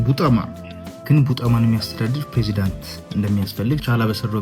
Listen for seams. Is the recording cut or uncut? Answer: cut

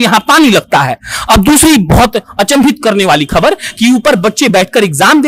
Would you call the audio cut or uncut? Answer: uncut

